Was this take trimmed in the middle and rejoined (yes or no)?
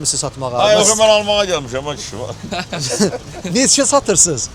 no